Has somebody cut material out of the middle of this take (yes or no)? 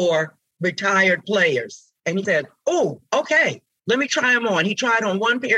yes